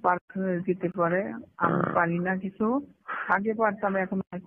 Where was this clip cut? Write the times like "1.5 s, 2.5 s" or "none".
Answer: none